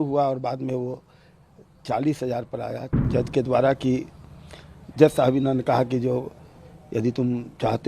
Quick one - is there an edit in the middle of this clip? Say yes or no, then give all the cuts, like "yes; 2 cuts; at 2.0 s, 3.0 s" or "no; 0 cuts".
yes; 1 cut; at 3.0 s